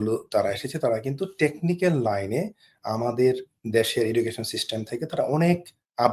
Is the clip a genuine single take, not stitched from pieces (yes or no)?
yes